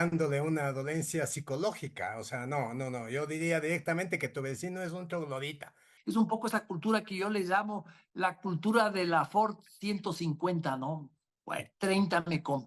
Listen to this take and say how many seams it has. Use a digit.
1